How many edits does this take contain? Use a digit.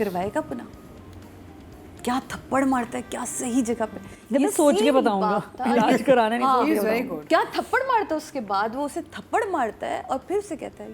0